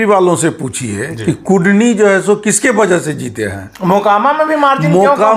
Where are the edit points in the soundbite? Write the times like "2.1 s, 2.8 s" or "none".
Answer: none